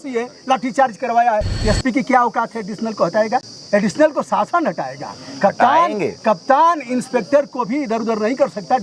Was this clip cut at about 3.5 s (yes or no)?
yes